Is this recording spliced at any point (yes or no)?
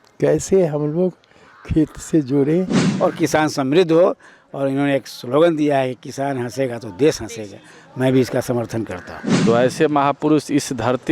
yes